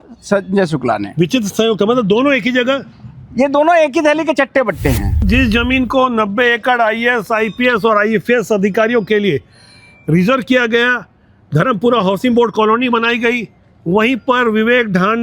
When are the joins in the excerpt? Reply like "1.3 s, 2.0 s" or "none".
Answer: 5.2 s